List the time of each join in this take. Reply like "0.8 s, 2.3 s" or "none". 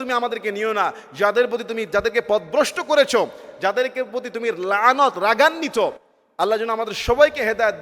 none

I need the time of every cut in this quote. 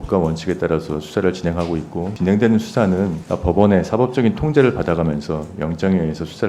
2.1 s, 3.2 s

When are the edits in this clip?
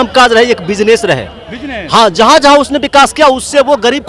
none

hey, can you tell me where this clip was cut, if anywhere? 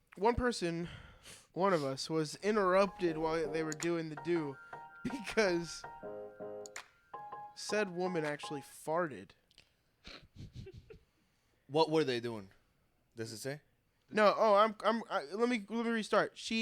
none

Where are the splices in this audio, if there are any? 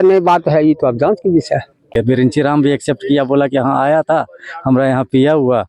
1.9 s

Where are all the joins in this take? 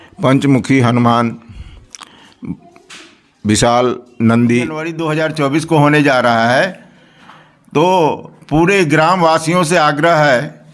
5.0 s

